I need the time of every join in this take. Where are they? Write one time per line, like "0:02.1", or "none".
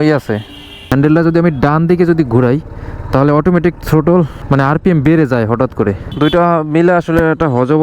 0:00.9
0:04.4
0:06.1